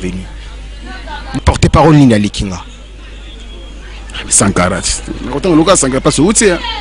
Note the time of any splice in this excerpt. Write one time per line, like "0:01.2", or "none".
0:01.2